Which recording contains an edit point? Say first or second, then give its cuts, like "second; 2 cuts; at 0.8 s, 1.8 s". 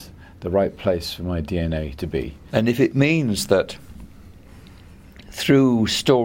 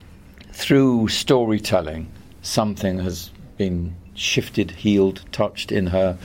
first; 1 cut; at 2.4 s